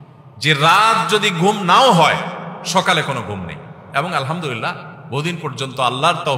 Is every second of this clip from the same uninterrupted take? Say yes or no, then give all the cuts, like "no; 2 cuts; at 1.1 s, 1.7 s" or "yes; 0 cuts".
yes; 0 cuts